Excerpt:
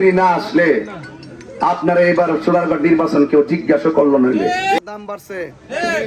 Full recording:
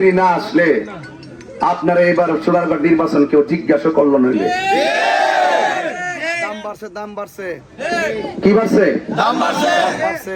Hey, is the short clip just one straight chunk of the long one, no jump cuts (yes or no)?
no